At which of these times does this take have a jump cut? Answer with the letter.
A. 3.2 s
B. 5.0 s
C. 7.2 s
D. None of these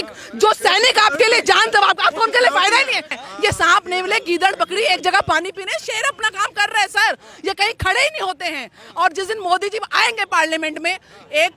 A